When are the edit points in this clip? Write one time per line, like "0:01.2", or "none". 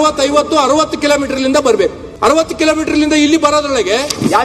0:02.1